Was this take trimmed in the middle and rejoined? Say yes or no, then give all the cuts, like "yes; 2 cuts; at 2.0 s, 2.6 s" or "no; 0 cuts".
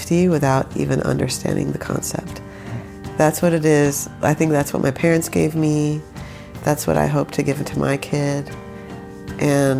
no; 0 cuts